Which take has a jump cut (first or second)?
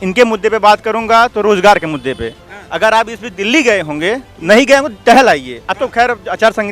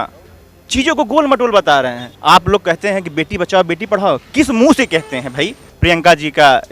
second